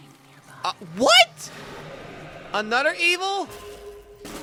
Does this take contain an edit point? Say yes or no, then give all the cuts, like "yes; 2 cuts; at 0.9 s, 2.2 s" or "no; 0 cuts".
no; 0 cuts